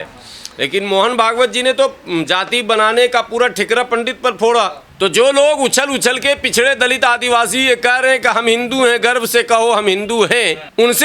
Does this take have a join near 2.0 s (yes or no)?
no